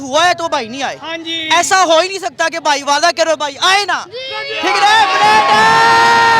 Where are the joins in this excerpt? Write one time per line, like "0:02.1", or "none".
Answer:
none

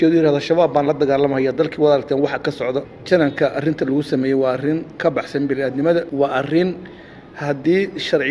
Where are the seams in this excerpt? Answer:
0:02.9
0:06.1

